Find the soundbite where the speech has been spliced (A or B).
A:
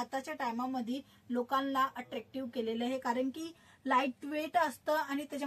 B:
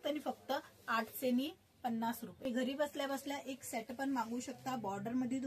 B